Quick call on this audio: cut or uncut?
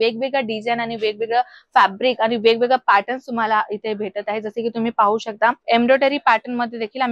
cut